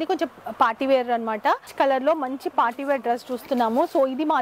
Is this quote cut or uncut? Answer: cut